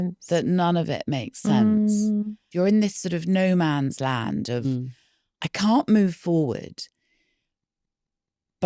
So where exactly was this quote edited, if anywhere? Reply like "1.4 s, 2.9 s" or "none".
2.4 s